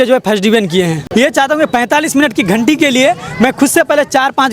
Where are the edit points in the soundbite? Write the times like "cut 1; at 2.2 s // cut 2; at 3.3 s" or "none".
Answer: cut 1; at 1.0 s